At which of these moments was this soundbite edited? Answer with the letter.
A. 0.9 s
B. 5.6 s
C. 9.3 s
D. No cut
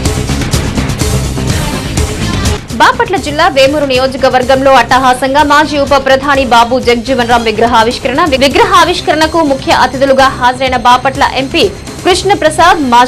A